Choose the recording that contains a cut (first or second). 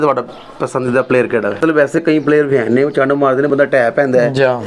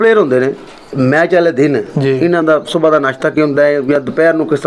first